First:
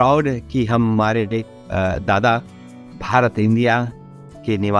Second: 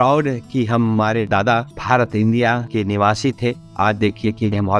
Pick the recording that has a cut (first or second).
second